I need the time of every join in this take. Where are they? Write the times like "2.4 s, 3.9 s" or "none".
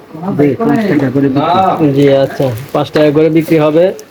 none